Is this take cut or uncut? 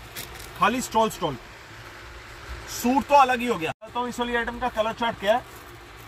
cut